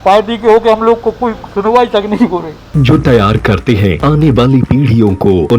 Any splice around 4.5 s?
no; 1 cut; at 2.6 s

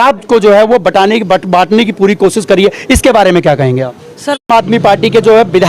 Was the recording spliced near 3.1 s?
no; 1 cut; at 4.5 s

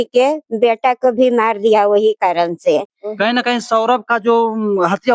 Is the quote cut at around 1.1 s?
no; 1 cut; at 2.9 s

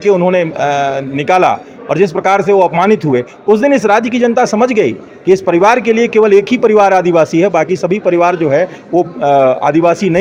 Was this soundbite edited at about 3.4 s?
no; 0 cuts

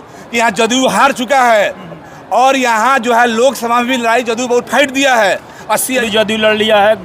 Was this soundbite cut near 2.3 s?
no; 1 cut; at 6.0 s

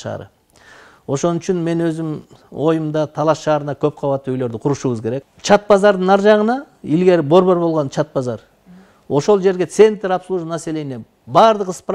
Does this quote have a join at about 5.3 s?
yes; 1 cut; at 5.3 s

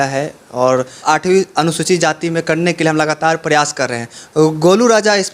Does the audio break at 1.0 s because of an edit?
yes; 1 cut; at 1.0 s

